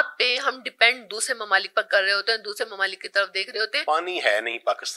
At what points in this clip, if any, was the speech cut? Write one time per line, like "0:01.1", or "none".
0:03.7